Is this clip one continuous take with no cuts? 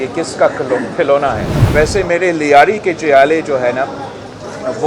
no; 1 cut; at 1.5 s

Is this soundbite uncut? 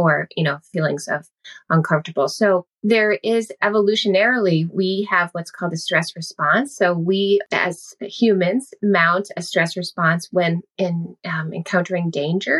no; 3 cuts; at 2.7 s, 7.5 s, 10.7 s

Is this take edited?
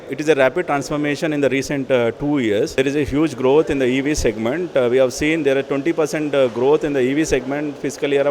yes; 1 cut; at 2.8 s

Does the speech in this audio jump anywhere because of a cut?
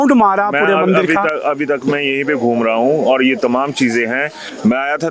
no; 0 cuts

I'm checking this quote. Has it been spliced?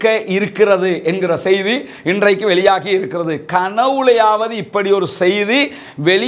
no; 0 cuts

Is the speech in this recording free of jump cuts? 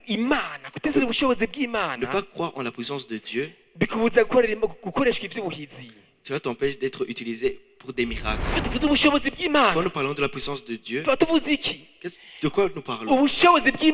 no; 1 cut; at 8.4 s

